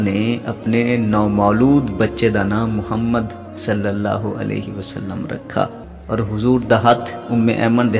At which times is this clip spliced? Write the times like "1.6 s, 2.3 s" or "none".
5.9 s